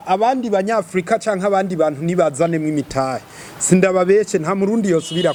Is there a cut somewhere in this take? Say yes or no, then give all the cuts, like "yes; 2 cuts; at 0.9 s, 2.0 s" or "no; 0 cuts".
no; 0 cuts